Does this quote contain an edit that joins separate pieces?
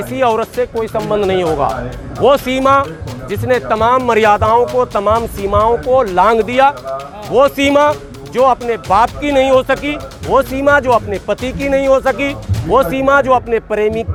no; 0 cuts

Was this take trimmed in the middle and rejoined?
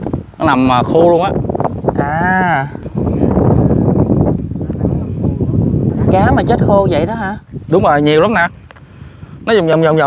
yes; 2 cuts; at 2.8 s, 5.9 s

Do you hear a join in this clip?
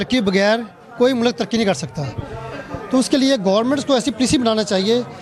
no; 0 cuts

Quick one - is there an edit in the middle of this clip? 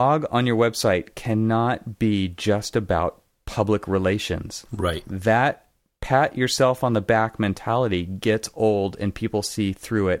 no; 0 cuts

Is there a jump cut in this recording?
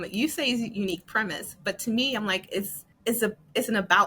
yes; 1 cut; at 2.8 s

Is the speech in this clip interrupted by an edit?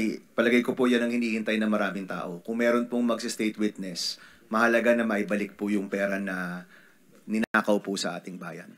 no; 0 cuts

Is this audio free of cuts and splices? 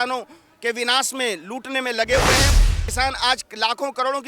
no; 1 cut; at 2.5 s

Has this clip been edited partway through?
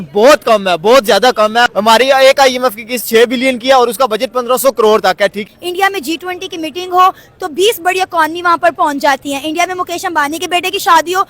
yes; 1 cut; at 5.4 s

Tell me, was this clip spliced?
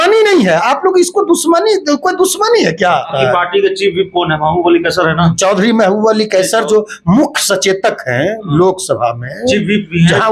yes; 1 cut; at 3.1 s

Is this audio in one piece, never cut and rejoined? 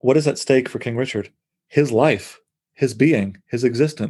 yes; 0 cuts

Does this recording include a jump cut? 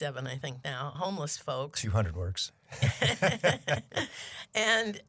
no; 0 cuts

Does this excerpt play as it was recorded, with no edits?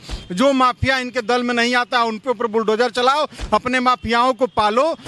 yes; 0 cuts

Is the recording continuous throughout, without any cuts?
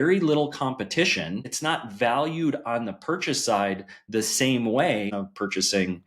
no; 2 cuts; at 1.5 s, 5.1 s

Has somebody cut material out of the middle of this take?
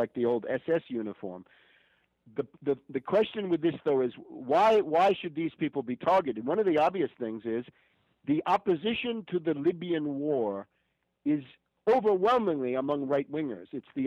no; 0 cuts

